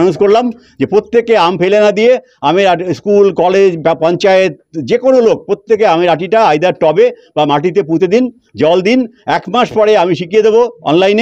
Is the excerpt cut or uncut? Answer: uncut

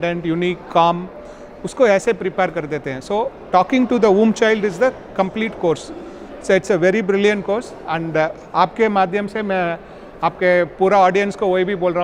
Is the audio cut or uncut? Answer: uncut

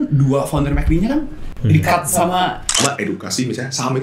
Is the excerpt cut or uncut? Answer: cut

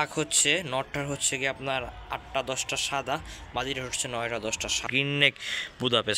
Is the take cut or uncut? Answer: cut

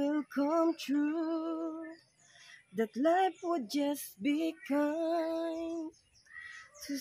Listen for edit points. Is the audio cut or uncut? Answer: uncut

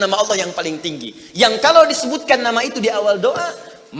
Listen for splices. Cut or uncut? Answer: uncut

